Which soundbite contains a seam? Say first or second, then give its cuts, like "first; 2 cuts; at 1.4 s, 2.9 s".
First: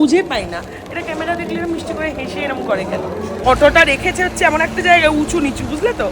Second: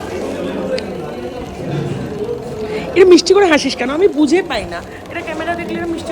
first; 1 cut; at 3.4 s